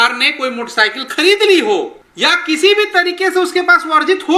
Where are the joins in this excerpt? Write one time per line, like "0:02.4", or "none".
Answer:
0:02.0